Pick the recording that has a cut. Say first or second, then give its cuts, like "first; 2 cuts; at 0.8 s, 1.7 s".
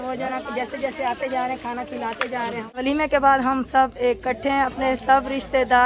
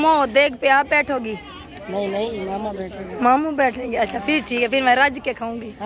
first; 1 cut; at 2.8 s